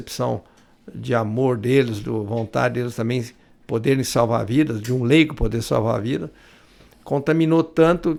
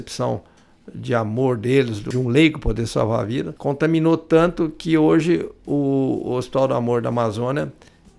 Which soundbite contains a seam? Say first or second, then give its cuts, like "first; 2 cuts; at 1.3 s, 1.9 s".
second; 2 cuts; at 2.0 s, 3.5 s